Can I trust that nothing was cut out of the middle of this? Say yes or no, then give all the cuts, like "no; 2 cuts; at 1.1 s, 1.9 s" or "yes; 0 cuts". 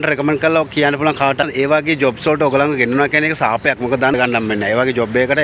no; 2 cuts; at 1.4 s, 4.1 s